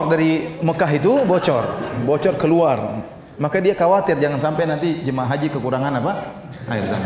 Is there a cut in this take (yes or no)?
no